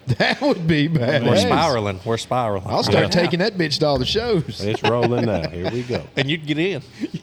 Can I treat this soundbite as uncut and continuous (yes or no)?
yes